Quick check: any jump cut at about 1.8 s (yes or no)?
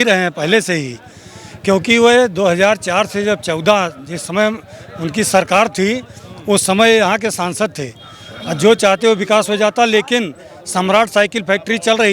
no